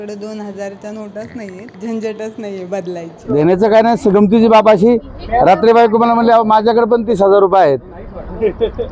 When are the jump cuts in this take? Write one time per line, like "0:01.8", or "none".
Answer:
0:01.7
0:03.2

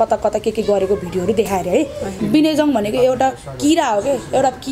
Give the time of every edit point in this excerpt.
0:02.1

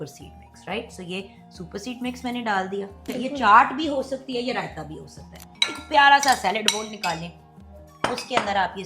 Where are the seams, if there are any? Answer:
0:03.0
0:05.5

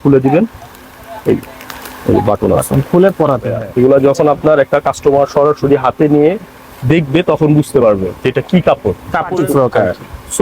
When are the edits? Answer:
0:03.6
0:09.3

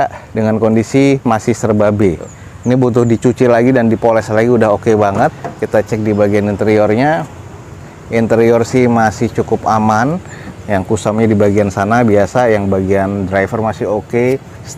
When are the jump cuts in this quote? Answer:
none

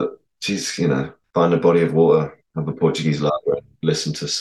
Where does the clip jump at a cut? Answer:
0:01.2
0:02.5

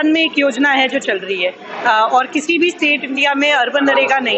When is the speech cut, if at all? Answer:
none

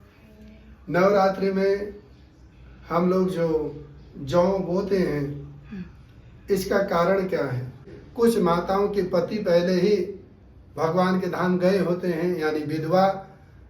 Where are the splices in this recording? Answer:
0:08.0

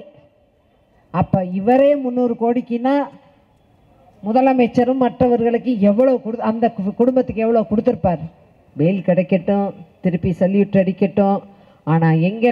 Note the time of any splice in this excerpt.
0:08.6

